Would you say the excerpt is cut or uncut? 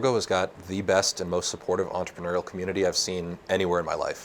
uncut